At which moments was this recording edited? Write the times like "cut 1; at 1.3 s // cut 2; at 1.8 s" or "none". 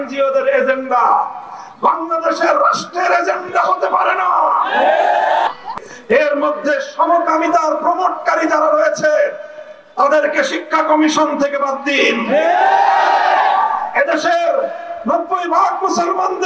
cut 1; at 5.6 s